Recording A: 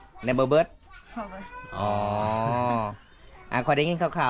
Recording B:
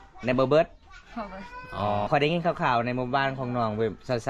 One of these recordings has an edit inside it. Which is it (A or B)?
B